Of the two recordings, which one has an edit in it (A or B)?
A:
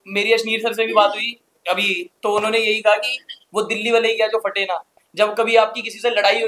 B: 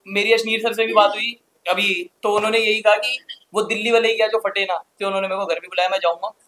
B